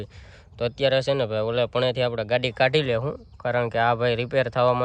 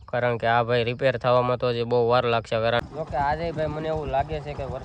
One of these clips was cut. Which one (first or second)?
second